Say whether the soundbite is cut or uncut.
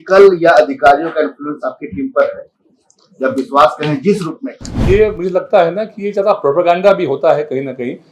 cut